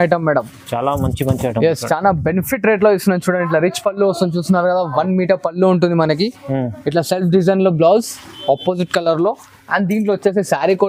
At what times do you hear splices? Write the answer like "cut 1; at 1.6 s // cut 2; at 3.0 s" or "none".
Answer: none